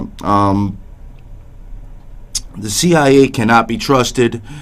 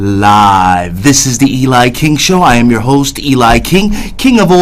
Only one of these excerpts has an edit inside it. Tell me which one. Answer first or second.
second